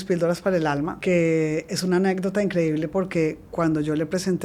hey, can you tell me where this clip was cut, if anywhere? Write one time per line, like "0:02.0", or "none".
0:00.9